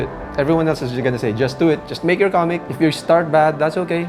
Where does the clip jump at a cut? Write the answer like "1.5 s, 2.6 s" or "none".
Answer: none

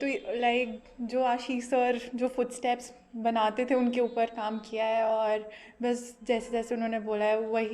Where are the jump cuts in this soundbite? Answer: none

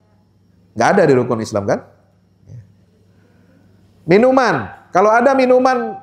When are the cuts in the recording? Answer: none

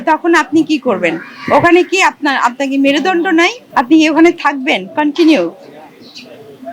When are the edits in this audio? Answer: 3.6 s

